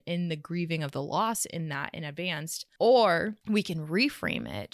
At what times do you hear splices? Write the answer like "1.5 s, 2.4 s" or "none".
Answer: 2.6 s, 3.4 s